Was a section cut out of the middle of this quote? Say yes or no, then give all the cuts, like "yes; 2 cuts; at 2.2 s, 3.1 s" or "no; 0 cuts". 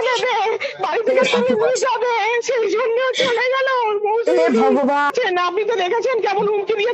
yes; 1 cut; at 5.1 s